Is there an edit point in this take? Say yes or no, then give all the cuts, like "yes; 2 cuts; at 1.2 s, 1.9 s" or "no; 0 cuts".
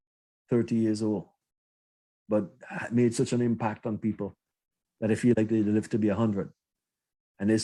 no; 0 cuts